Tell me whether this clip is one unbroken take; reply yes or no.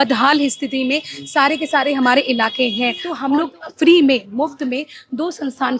no